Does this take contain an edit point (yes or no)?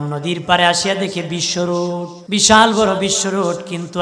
yes